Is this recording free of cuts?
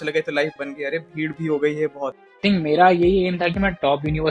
no; 1 cut; at 2.4 s

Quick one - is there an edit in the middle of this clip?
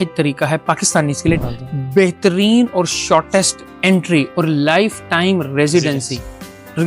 yes; 1 cut; at 1.4 s

